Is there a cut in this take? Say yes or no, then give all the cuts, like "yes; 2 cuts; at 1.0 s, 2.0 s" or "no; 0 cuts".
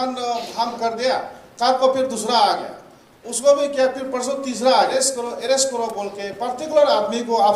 yes; 1 cut; at 4.9 s